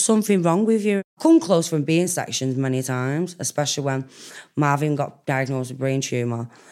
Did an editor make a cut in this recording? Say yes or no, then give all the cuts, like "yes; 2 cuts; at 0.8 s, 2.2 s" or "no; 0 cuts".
yes; 1 cut; at 1.1 s